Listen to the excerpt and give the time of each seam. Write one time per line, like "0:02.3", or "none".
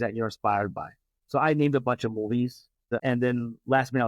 0:03.0